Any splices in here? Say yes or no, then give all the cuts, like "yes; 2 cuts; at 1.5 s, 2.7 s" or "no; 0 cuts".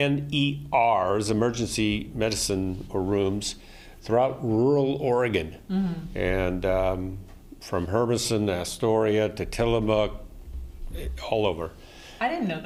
no; 0 cuts